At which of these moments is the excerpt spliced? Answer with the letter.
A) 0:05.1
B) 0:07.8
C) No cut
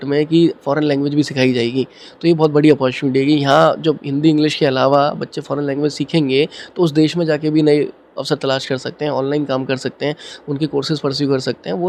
C